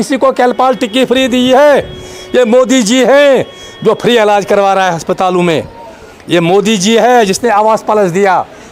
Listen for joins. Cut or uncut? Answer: uncut